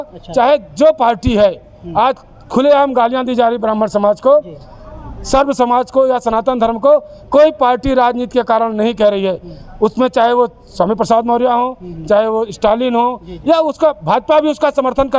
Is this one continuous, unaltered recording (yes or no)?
yes